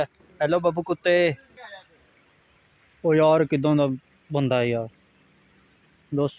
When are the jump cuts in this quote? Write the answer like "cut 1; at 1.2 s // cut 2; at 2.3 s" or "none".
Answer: cut 1; at 1.7 s

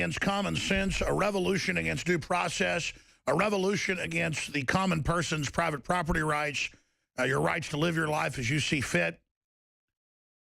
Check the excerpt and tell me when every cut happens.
cut 1; at 2.5 s

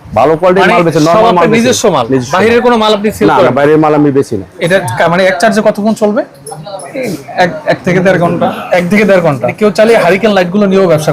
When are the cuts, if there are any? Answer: cut 1; at 4.5 s // cut 2; at 9.5 s

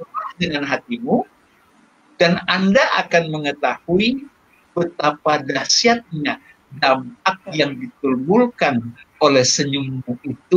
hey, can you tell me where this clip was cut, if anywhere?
none

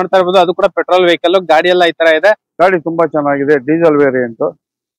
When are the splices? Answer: cut 1; at 2.5 s

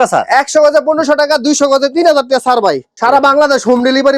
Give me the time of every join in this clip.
cut 1; at 2.9 s

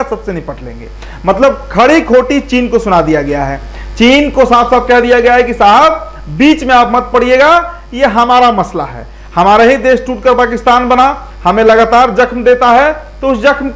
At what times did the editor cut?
none

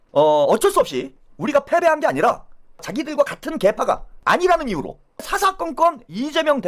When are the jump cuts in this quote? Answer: cut 1; at 2.9 s // cut 2; at 4.1 s // cut 3; at 5.3 s

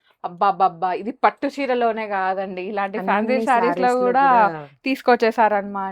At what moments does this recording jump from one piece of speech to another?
none

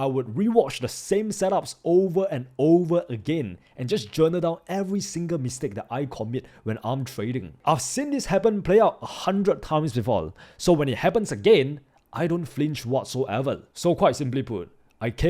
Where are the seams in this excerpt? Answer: cut 1; at 13.7 s

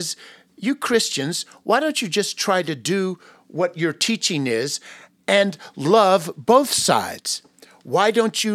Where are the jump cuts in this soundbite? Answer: none

